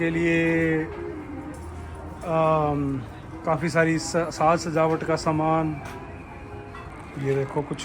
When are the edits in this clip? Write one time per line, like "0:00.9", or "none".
0:06.9